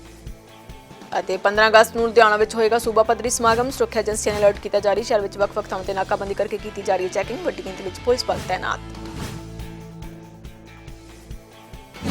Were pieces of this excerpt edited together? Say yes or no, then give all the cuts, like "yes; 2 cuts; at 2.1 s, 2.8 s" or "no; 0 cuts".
yes; 1 cut; at 1.0 s